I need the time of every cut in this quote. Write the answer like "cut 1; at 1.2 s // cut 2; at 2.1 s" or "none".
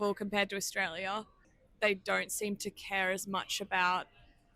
cut 1; at 1.3 s